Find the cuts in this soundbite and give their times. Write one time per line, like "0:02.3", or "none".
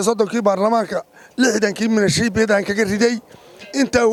none